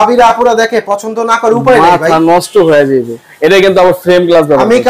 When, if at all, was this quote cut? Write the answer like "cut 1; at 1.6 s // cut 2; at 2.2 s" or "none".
none

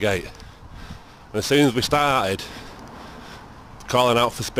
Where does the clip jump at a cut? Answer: cut 1; at 3.0 s

